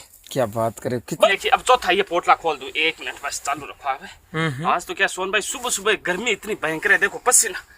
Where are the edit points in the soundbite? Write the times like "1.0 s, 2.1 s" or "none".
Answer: 1.3 s